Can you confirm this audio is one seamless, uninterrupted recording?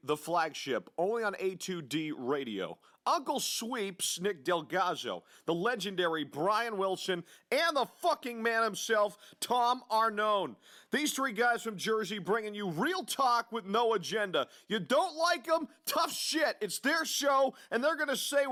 yes; 0 cuts

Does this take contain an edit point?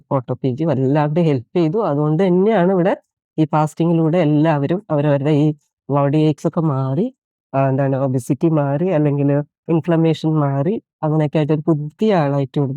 no; 0 cuts

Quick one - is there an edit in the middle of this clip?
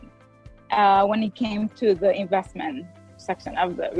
no; 0 cuts

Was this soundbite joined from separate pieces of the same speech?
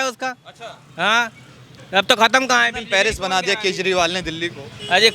no; 0 cuts

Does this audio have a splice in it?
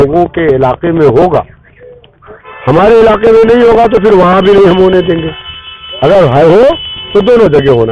no; 0 cuts

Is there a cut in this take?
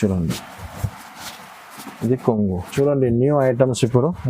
yes; 1 cut; at 2.6 s

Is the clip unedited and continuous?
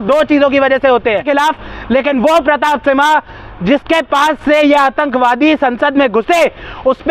no; 1 cut; at 1.2 s

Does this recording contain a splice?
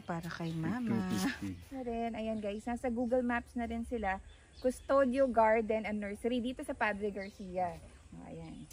yes; 1 cut; at 1.6 s

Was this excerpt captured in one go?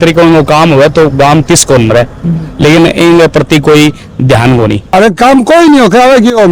no; 1 cut; at 4.9 s

